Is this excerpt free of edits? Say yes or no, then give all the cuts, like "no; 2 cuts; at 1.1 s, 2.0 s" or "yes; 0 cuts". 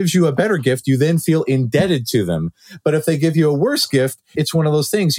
no; 1 cut; at 4.2 s